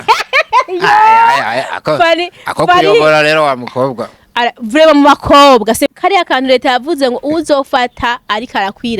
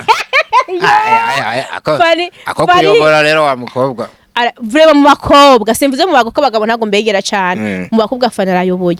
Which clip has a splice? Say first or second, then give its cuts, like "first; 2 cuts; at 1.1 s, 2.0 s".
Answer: first; 1 cut; at 5.9 s